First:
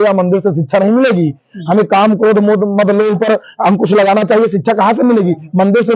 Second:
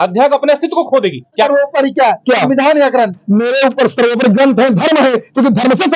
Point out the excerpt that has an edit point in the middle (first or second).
second